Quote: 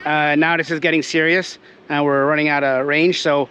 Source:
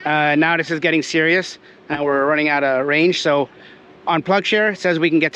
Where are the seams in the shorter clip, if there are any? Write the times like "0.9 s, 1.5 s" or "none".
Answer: none